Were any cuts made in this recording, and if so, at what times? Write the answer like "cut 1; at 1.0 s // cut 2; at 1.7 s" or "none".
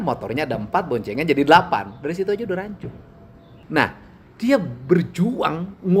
cut 1; at 3.5 s